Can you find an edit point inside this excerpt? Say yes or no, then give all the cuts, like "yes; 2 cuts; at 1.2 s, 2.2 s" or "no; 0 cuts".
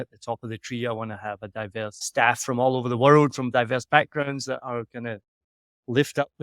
yes; 1 cut; at 2.0 s